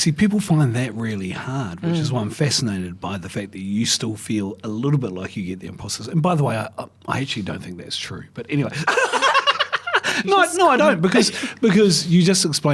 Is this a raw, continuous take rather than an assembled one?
yes; 0 cuts

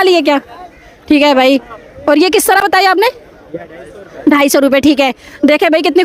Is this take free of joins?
yes; 0 cuts

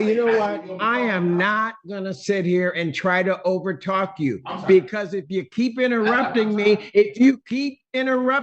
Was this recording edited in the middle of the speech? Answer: no; 0 cuts

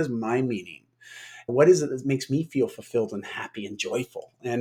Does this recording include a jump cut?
no; 0 cuts

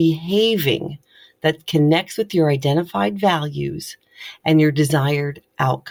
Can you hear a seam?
no; 0 cuts

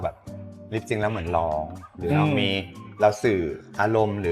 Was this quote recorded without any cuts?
yes; 0 cuts

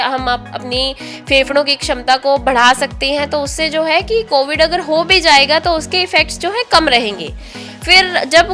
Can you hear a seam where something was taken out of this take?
no; 0 cuts

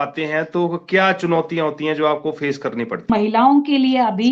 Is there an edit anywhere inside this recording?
yes; 1 cut; at 3.1 s

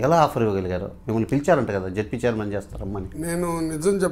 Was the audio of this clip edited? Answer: no; 0 cuts

